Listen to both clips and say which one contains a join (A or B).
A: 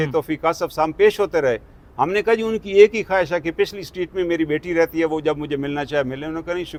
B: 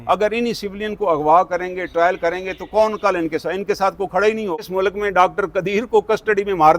B